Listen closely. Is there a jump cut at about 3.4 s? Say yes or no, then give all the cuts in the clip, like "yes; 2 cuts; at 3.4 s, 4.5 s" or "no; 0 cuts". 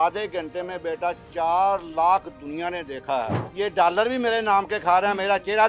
yes; 1 cut; at 3.4 s